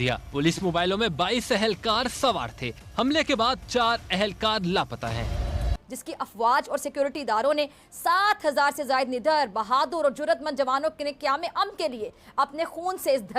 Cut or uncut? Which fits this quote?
cut